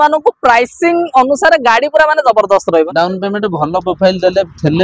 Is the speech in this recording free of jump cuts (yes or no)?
no